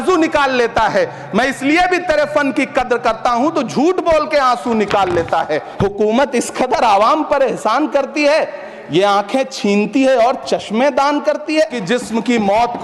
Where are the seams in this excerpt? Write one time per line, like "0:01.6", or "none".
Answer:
0:05.6
0:11.8